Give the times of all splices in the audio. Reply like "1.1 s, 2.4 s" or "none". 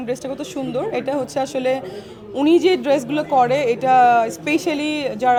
none